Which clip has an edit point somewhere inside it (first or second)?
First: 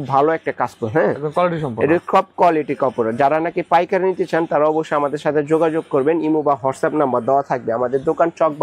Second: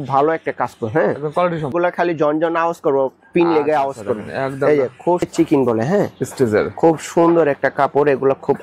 second